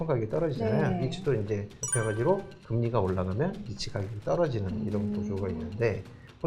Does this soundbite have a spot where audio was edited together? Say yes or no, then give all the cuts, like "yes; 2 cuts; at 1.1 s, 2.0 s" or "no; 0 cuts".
yes; 1 cut; at 1.8 s